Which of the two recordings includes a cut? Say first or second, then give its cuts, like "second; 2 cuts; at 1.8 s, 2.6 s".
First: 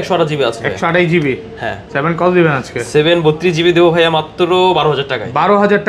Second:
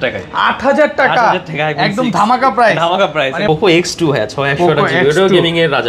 second; 1 cut; at 3.4 s